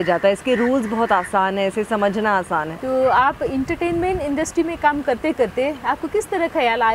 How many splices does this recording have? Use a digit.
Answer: 1